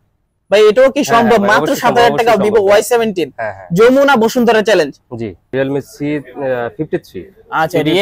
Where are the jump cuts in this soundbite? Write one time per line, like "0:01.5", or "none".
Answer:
0:05.5